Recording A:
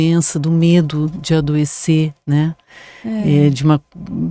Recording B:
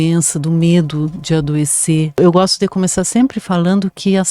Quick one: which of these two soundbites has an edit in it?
B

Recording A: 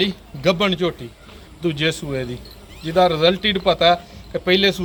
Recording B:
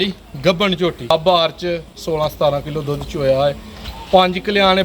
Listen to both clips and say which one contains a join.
B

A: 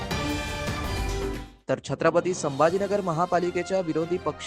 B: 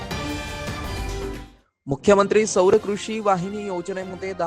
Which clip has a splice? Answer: A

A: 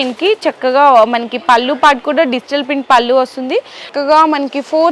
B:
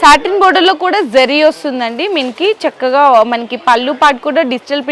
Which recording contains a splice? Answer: A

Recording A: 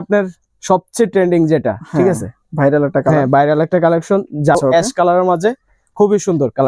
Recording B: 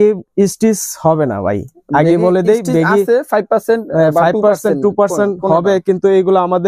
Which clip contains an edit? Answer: A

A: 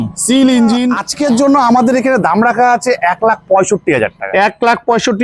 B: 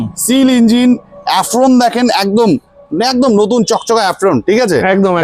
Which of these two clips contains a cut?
A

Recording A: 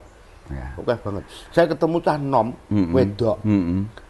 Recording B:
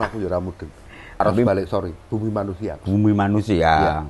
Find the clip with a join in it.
B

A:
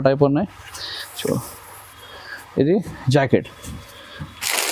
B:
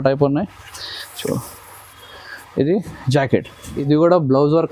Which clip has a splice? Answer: B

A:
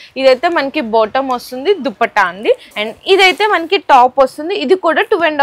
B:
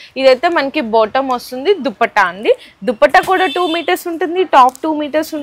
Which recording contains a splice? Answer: A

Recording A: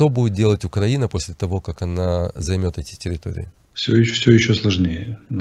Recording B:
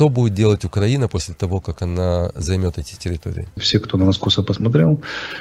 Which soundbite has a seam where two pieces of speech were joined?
B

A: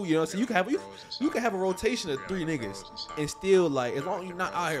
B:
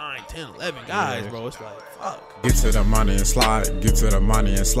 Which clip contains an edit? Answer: B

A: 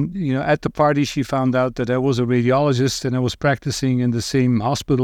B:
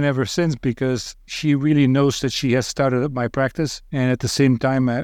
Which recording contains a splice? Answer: B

